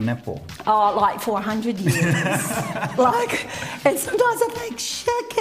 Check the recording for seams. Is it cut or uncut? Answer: uncut